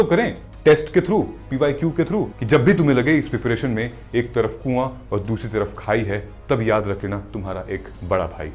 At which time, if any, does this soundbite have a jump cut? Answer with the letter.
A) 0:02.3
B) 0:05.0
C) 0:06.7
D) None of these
A